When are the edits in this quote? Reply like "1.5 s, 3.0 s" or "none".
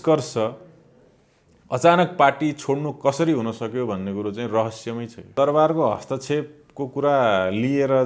5.3 s